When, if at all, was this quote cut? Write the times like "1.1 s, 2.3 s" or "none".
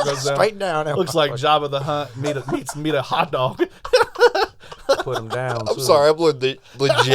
5.0 s

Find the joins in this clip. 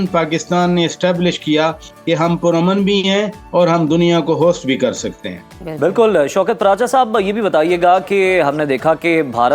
none

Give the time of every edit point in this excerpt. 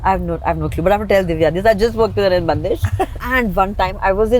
3.2 s

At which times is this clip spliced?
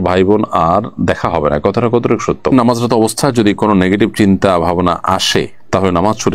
2.5 s

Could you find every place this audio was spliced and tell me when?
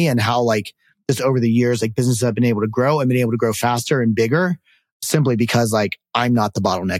none

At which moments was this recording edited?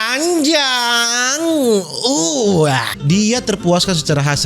3.0 s

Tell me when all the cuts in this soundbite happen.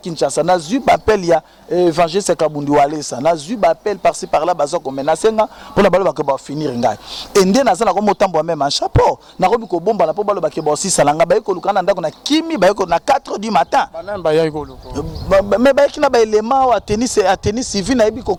none

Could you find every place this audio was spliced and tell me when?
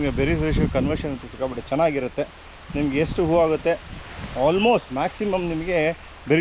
none

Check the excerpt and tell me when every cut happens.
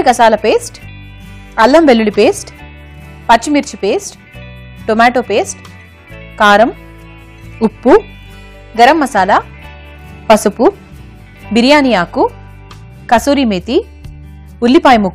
none

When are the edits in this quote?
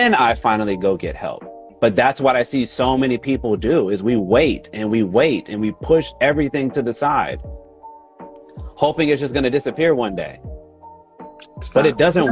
1.6 s

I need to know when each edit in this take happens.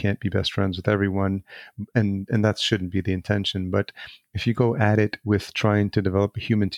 none

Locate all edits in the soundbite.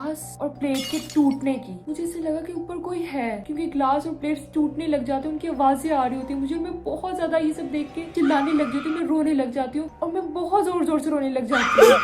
none

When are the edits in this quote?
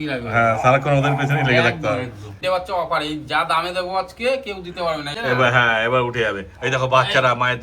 2.4 s, 5.1 s

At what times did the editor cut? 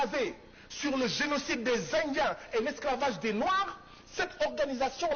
none

